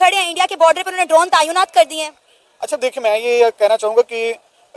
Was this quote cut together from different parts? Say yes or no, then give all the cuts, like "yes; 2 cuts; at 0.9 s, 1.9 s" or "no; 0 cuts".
no; 0 cuts